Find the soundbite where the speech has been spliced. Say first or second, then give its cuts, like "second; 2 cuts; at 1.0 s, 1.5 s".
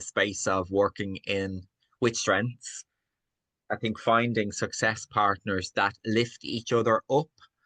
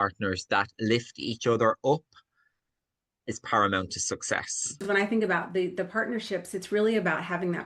second; 1 cut; at 4.8 s